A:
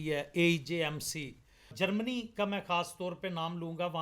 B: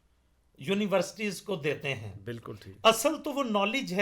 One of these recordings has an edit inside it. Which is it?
A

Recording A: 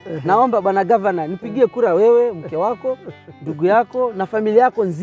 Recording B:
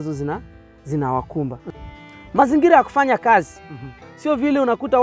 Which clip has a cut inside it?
B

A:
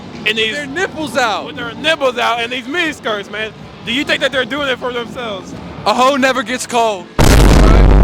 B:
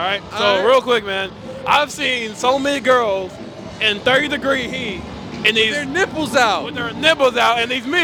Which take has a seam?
A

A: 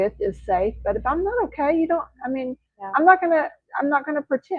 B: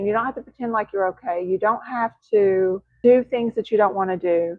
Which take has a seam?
B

